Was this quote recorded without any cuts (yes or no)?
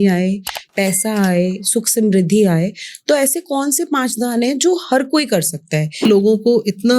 no